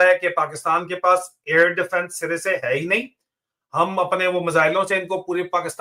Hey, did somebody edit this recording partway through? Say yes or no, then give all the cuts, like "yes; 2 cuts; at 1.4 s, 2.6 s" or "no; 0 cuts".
no; 0 cuts